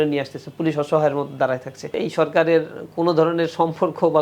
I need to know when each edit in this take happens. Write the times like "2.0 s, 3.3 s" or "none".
2.0 s